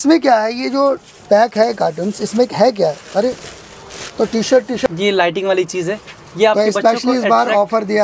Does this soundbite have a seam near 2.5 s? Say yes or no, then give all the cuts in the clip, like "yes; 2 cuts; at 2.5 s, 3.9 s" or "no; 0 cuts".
no; 1 cut; at 4.9 s